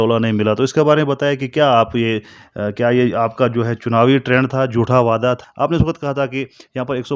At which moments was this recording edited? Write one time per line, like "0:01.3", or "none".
0:05.4